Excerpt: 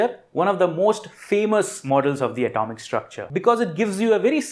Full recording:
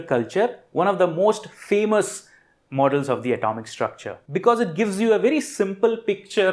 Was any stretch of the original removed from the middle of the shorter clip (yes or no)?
yes